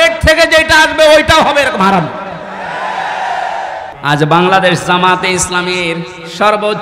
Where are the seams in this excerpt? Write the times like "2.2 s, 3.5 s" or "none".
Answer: 3.9 s